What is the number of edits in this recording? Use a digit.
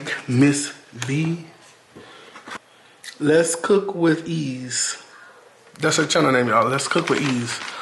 1